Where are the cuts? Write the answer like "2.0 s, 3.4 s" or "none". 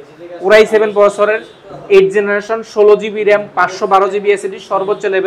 none